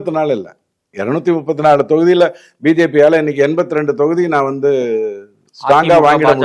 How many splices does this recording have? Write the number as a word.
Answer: zero